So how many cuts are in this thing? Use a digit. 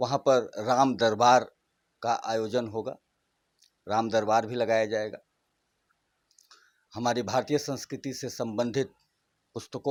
0